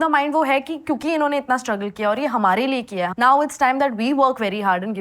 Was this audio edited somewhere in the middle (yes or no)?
yes